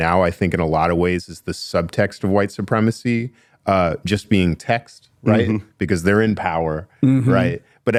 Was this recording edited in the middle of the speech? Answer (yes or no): no